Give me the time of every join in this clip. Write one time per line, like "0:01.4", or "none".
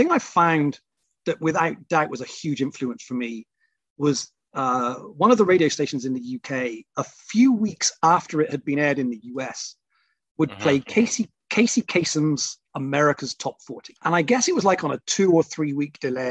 0:14.0